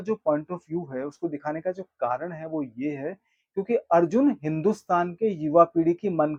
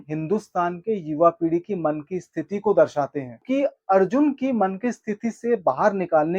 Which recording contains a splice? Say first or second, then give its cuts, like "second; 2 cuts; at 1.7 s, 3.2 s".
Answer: second; 1 cut; at 3.4 s